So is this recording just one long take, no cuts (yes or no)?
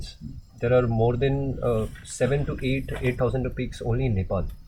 yes